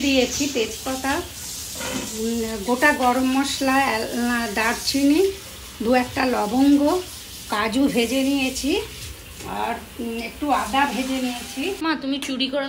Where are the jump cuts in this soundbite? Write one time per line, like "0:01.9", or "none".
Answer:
0:11.8